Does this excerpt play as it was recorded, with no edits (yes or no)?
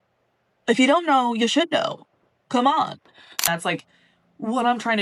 no